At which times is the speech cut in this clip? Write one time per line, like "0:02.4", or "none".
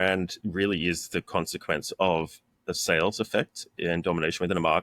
none